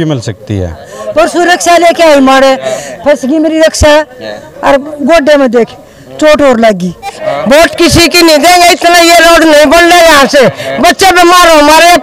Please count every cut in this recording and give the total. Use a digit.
2